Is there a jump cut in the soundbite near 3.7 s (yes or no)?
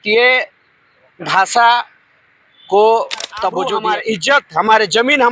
yes